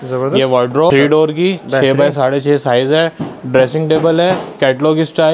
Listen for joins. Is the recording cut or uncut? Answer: cut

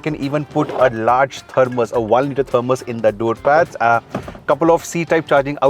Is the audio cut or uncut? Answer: uncut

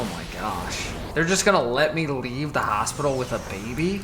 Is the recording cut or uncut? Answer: cut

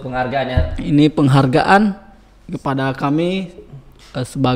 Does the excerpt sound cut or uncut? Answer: uncut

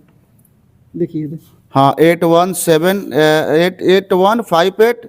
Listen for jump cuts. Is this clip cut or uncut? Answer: uncut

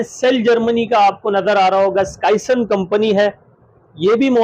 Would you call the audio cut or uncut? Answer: uncut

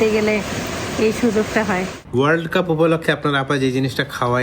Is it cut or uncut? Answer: cut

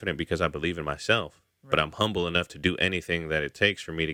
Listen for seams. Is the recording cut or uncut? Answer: uncut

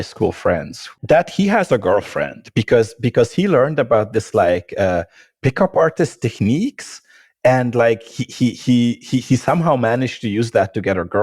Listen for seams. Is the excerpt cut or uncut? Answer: uncut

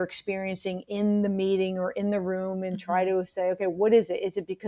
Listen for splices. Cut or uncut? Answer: uncut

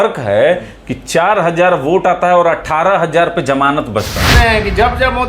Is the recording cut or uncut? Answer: cut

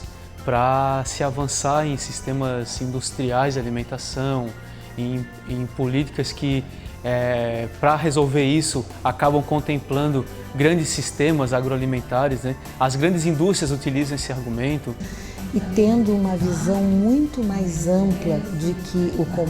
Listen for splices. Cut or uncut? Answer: cut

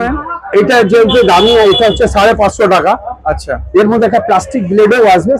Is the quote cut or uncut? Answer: uncut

